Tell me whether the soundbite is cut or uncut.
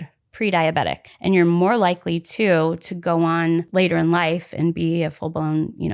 cut